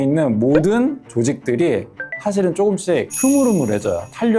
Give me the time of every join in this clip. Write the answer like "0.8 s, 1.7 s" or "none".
3.1 s